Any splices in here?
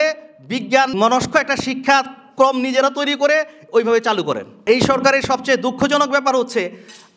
yes; 2 cuts; at 0.9 s, 4.6 s

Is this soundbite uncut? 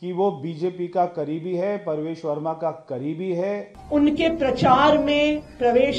no; 1 cut; at 3.7 s

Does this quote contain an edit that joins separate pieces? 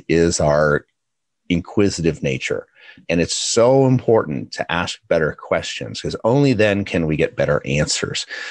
yes; 1 cut; at 3.0 s

